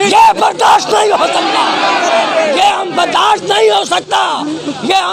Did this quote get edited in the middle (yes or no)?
no